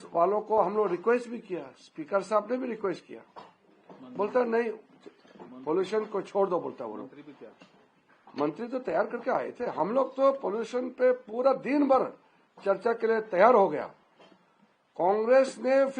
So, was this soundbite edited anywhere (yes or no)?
no